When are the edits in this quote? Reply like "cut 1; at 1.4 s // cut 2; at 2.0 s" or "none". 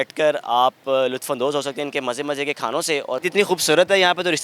cut 1; at 3.2 s